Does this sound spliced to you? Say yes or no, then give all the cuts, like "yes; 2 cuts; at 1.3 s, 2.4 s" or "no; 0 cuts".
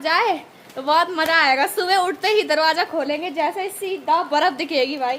no; 0 cuts